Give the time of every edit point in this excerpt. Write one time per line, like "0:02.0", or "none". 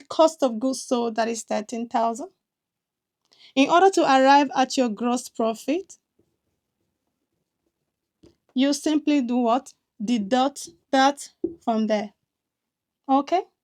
none